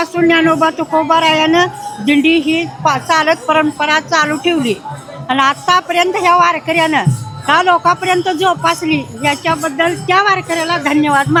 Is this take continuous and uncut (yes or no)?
yes